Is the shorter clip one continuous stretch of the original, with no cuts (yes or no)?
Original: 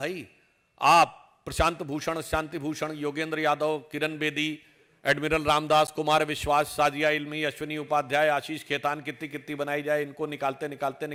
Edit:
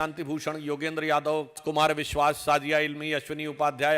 no